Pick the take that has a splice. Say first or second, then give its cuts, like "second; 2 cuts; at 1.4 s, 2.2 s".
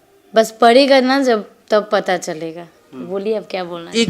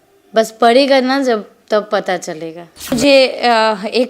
second; 1 cut; at 2.9 s